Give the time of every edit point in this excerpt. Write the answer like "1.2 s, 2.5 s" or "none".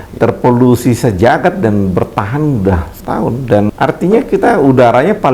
3.7 s